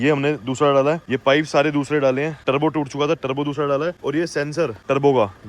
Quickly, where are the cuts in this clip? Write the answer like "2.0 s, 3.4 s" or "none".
1.1 s, 2.4 s, 4.4 s